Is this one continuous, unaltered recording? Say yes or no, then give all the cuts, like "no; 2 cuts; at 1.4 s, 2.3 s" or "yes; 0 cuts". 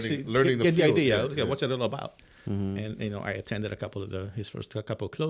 yes; 0 cuts